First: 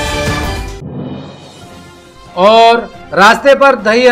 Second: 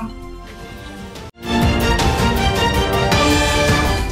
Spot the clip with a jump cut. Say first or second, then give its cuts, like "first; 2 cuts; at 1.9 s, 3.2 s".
first; 1 cut; at 1.2 s